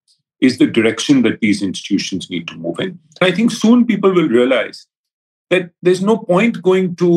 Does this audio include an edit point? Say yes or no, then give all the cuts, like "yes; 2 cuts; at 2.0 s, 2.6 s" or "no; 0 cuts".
yes; 1 cut; at 3.2 s